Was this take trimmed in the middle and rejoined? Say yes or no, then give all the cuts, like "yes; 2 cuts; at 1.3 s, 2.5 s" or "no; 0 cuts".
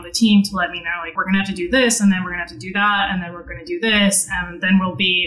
yes; 1 cut; at 1.1 s